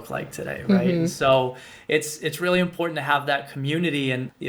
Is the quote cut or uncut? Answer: uncut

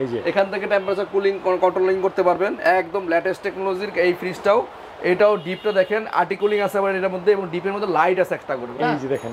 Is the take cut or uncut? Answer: uncut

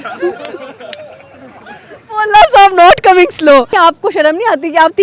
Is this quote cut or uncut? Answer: cut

